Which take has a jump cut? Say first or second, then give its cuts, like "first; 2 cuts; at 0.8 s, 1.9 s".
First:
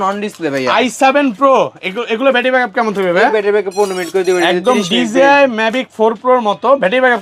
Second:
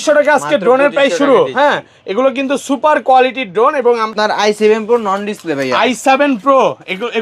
second; 1 cut; at 4.1 s